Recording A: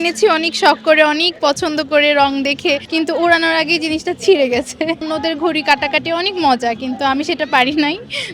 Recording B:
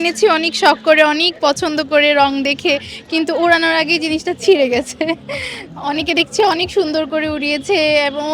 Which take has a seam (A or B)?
A